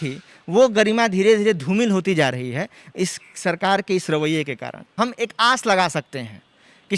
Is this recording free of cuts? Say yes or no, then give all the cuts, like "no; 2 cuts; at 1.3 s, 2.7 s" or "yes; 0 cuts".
no; 1 cut; at 4.9 s